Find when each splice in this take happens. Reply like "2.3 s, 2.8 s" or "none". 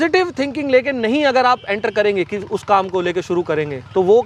none